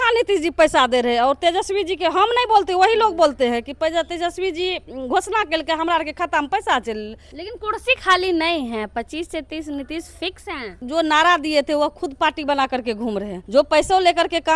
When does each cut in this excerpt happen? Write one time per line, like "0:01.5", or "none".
0:07.3
0:10.8
0:13.4